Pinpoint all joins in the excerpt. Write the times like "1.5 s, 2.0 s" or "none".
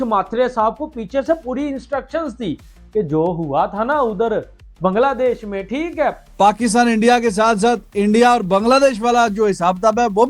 6.2 s